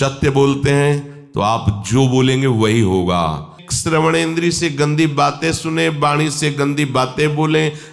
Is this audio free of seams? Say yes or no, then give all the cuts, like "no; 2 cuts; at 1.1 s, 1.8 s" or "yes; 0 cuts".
no; 1 cut; at 3.6 s